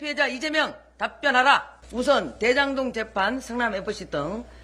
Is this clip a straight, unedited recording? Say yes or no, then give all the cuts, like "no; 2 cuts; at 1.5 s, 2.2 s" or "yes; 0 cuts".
no; 1 cut; at 1.8 s